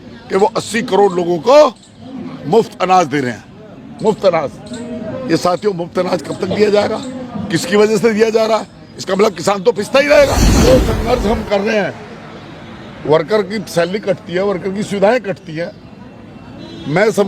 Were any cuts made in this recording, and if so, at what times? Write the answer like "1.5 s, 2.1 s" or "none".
10.6 s